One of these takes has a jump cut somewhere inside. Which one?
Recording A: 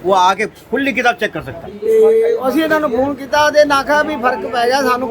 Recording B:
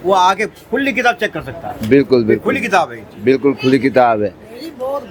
A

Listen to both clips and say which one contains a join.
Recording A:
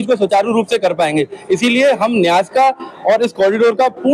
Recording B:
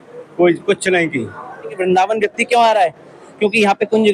B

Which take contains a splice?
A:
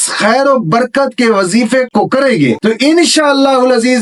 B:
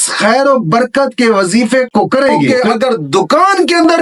B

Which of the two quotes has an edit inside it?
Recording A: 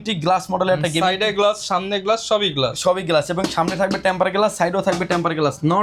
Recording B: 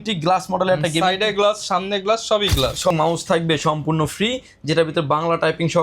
B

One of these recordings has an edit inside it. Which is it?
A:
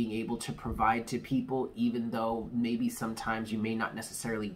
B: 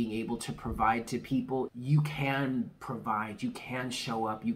B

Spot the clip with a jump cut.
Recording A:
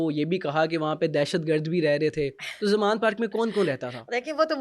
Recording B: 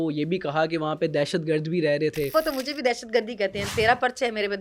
B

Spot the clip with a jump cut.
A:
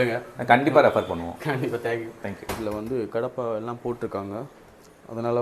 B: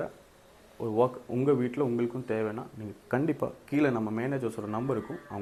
A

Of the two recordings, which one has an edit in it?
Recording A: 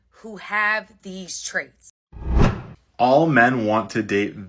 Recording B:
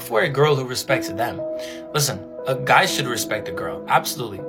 A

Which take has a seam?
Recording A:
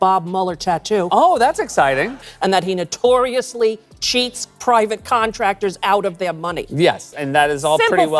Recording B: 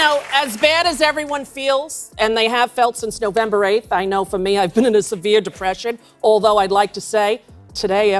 A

